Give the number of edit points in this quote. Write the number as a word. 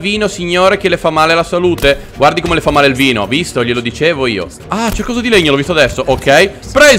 one